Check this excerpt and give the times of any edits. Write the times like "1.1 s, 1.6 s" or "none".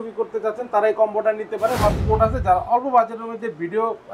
2.0 s